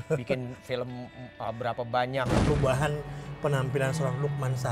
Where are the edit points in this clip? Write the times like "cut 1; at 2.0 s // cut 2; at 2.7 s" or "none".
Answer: cut 1; at 2.4 s